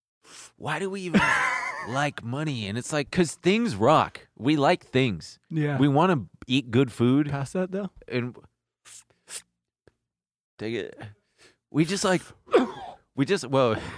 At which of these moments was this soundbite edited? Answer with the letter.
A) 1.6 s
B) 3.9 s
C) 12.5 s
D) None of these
A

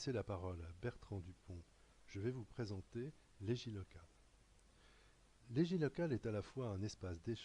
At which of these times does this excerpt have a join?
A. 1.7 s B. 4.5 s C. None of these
A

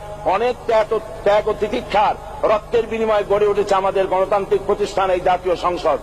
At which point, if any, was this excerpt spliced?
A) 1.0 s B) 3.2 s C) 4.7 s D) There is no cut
D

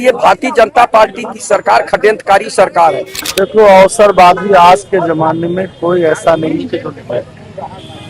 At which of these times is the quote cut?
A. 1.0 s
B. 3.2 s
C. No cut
B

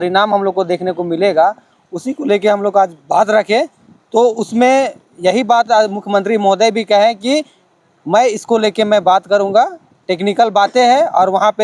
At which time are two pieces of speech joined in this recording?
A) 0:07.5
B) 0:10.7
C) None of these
C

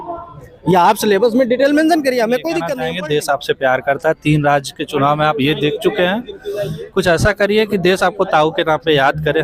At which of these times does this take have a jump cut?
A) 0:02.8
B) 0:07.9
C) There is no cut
A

